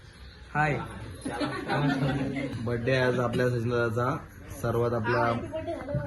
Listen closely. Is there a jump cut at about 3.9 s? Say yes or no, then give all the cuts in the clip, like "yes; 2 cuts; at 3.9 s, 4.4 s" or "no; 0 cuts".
no; 1 cut; at 2.5 s